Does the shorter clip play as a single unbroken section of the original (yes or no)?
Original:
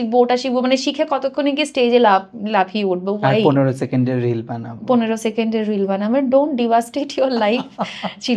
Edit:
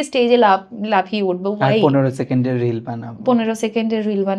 yes